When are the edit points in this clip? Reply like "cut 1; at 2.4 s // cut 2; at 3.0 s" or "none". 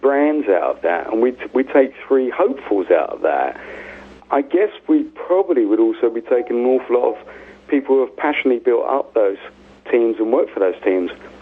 cut 1; at 3.1 s